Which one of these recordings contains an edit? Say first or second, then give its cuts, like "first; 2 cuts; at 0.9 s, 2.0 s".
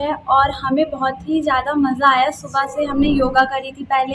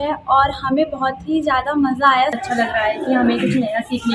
second; 1 cut; at 2.4 s